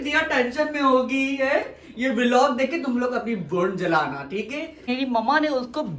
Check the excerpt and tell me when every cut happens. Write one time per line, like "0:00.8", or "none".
0:04.9